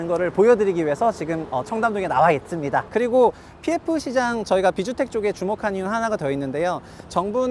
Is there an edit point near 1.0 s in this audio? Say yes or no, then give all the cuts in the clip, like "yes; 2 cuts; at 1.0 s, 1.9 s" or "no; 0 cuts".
no; 1 cut; at 2.9 s